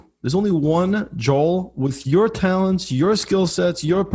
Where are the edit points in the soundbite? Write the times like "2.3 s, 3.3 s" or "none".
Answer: none